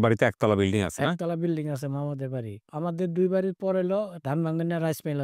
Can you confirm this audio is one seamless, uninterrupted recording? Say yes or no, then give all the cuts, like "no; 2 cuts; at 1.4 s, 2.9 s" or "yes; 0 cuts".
no; 2 cuts; at 2.7 s, 4.2 s